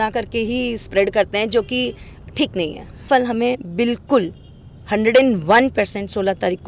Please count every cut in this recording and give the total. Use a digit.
1